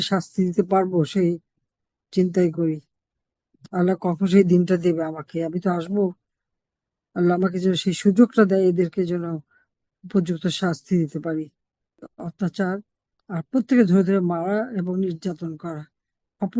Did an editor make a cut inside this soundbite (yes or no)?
yes